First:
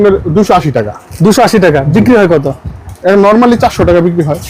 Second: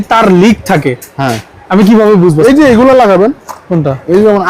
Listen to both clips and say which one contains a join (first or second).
second